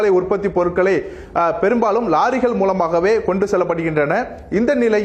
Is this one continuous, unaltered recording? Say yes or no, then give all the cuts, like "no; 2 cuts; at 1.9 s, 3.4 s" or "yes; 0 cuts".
no; 1 cut; at 2.0 s